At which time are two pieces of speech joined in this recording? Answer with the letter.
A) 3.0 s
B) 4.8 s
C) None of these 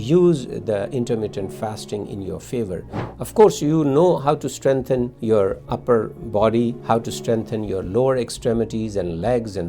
A